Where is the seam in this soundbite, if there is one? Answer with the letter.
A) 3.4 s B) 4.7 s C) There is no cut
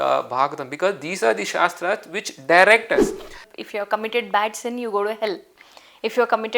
A